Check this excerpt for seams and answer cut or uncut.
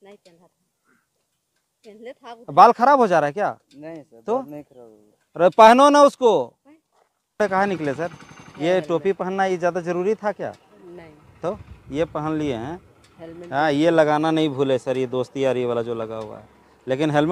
cut